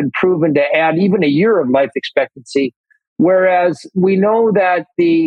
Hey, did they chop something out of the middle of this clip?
no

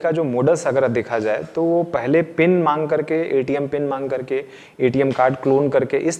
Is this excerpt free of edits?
yes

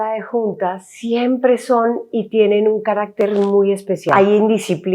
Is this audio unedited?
no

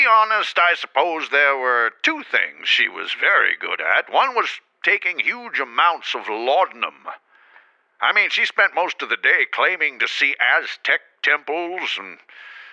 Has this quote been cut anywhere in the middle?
no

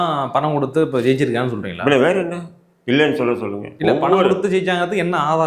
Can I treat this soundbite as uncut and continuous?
yes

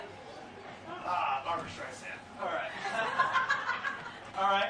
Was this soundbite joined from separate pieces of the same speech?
no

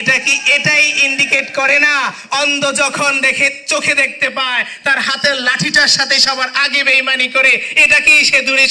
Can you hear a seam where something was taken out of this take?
no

